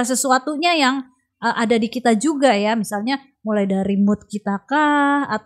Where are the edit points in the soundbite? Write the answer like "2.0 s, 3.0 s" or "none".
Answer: none